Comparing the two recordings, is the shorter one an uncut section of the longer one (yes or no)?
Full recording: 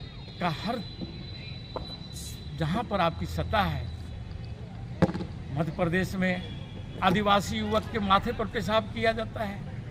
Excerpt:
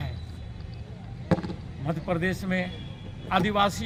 yes